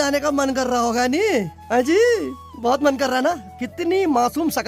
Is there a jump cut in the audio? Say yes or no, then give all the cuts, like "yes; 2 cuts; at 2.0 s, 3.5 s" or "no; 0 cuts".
no; 0 cuts